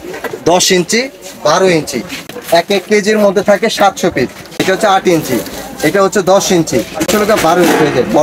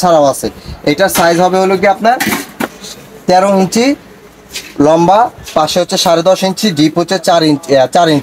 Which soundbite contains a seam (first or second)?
first